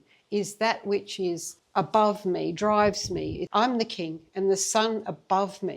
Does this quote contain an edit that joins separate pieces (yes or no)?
yes